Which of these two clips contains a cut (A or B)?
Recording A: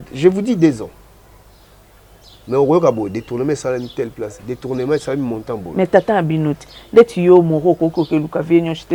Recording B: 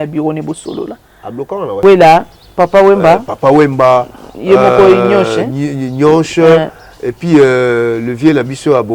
B